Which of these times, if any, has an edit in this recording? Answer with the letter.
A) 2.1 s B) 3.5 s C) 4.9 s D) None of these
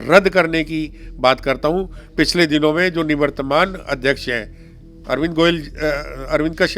D